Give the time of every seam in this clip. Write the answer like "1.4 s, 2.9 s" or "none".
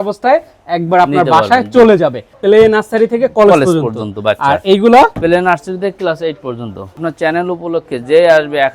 2.3 s, 7.0 s